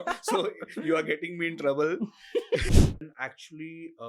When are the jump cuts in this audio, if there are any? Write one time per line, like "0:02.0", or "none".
0:02.6